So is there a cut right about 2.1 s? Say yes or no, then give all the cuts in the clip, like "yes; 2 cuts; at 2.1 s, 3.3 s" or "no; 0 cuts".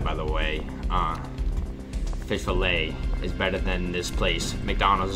no; 0 cuts